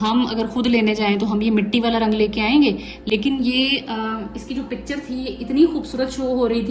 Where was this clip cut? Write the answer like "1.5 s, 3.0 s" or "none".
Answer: none